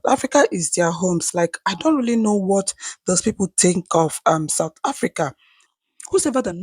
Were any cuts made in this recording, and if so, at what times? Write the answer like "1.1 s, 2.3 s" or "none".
5.6 s